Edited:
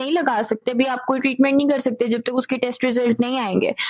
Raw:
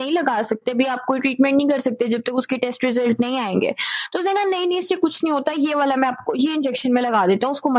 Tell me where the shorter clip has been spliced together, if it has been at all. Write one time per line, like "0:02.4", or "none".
none